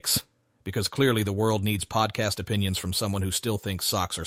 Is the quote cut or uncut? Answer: uncut